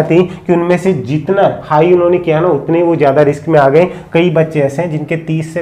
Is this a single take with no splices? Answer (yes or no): yes